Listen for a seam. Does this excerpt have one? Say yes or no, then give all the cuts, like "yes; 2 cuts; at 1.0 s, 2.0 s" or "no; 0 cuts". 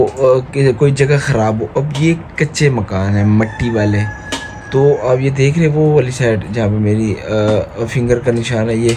no; 0 cuts